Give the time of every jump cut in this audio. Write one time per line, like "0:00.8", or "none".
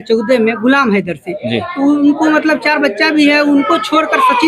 none